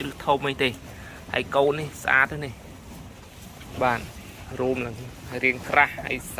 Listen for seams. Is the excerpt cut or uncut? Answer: uncut